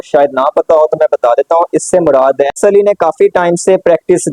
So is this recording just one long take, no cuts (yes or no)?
no